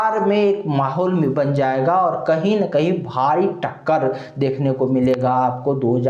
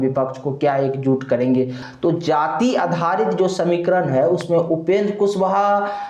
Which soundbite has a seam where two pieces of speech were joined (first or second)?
second